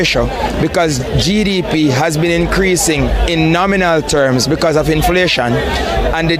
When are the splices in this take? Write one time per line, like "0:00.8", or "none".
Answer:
none